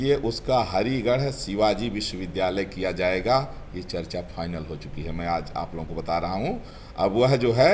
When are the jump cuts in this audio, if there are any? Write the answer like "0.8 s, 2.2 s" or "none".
none